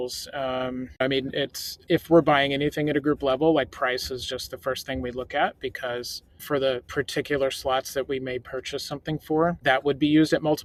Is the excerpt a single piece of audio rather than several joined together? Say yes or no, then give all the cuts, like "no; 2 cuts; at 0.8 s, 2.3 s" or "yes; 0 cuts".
yes; 0 cuts